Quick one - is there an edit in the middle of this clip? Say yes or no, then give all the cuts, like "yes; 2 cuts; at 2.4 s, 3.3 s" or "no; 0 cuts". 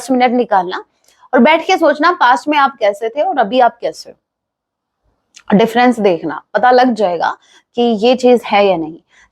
no; 0 cuts